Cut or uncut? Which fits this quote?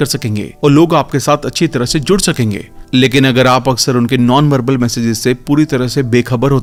uncut